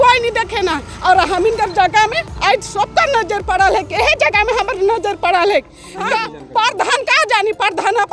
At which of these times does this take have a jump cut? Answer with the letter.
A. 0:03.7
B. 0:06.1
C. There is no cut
B